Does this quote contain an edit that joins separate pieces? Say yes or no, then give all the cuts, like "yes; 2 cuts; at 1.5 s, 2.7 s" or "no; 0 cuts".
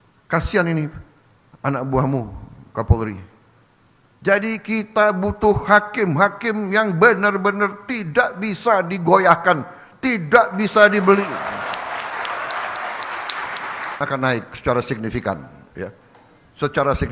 yes; 1 cut; at 14.0 s